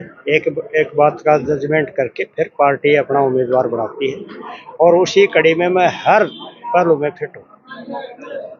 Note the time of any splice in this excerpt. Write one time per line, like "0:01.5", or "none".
none